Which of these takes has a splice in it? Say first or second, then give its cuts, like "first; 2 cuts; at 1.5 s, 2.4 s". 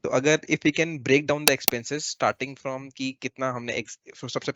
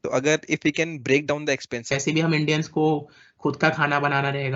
second; 1 cut; at 1.9 s